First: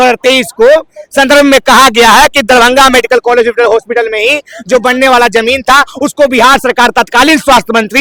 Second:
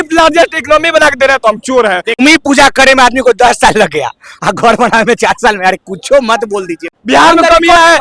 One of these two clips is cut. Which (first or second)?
second